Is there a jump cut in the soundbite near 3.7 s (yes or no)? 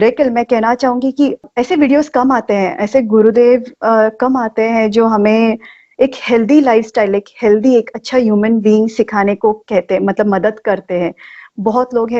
no